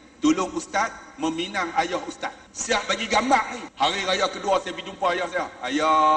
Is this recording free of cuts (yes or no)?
no